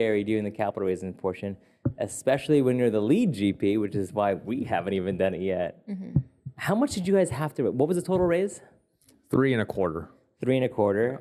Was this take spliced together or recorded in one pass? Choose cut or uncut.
uncut